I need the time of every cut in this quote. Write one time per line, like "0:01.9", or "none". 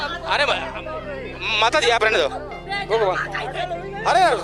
none